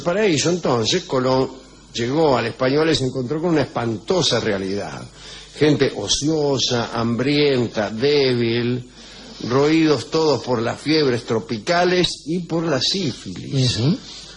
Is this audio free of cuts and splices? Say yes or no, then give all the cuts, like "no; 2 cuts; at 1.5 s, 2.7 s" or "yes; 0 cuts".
yes; 0 cuts